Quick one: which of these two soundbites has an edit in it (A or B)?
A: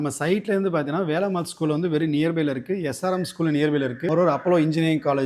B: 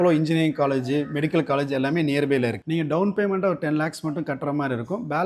B